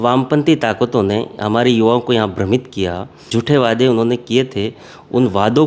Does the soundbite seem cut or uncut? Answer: cut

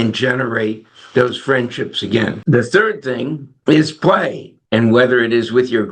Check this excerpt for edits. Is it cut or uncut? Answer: uncut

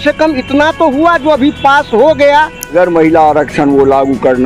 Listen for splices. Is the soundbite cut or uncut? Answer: cut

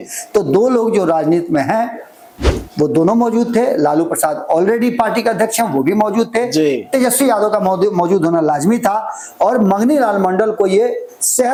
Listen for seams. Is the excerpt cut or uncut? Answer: uncut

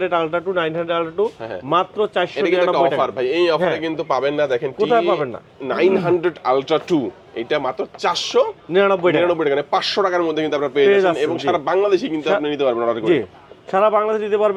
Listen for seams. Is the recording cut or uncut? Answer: uncut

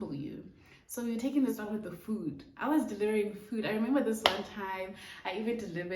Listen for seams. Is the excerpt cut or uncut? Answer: cut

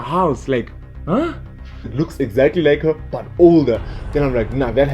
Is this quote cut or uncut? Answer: cut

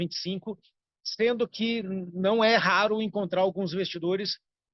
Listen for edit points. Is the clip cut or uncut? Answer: uncut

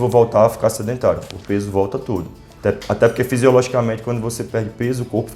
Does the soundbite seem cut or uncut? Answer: cut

